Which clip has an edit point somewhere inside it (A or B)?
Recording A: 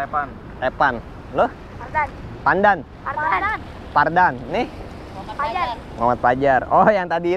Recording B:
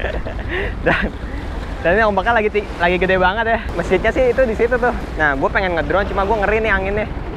B